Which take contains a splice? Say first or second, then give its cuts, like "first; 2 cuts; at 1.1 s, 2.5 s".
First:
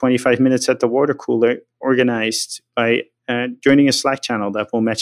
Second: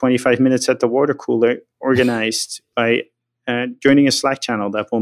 first; 1 cut; at 3.2 s